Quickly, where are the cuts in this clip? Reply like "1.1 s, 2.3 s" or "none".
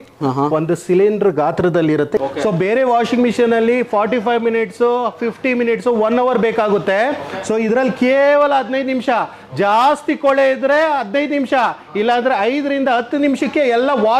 2.2 s